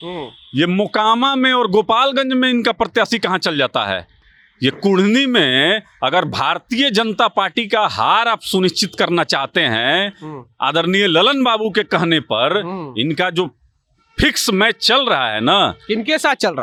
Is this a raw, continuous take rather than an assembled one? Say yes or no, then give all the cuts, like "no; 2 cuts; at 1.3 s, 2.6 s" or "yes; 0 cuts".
yes; 0 cuts